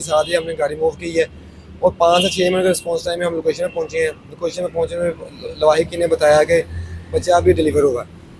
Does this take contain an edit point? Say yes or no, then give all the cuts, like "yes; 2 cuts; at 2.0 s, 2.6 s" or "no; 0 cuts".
no; 0 cuts